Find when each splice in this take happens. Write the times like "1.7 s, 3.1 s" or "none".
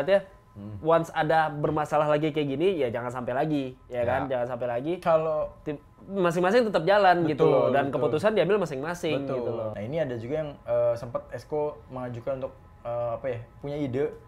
9.7 s